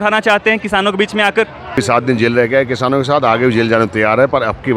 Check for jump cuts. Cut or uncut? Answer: cut